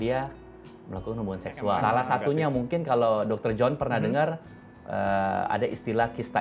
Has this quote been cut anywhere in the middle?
yes; 1 cut; at 1.8 s

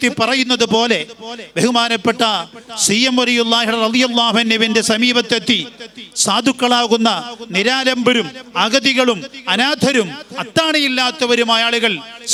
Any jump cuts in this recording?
no; 0 cuts

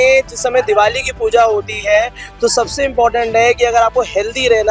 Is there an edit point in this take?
no; 0 cuts

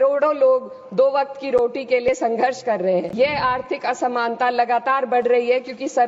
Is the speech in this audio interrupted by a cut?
yes; 1 cut; at 3.1 s

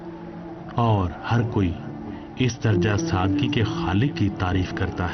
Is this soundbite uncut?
no; 1 cut; at 1.8 s

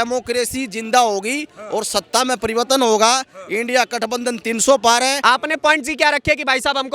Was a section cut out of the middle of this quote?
yes; 1 cut; at 5.2 s

